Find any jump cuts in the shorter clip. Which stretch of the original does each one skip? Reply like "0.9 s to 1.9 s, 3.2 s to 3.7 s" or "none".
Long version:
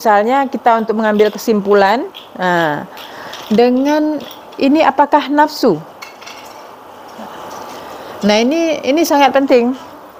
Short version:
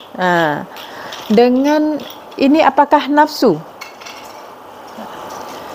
none